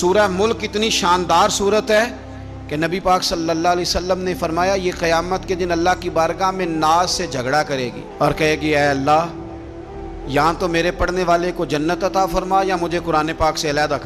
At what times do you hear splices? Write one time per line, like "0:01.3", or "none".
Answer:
none